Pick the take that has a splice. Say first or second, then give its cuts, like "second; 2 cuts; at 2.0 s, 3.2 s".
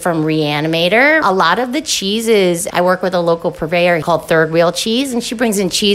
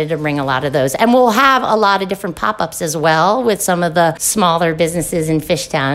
first; 2 cuts; at 1.2 s, 4.0 s